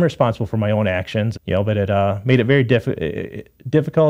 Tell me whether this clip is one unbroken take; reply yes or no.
no